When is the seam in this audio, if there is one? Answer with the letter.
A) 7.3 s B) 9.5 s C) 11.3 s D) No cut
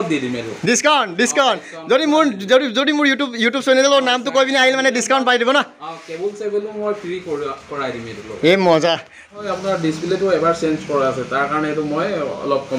B